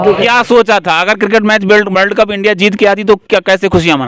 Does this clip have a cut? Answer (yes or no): no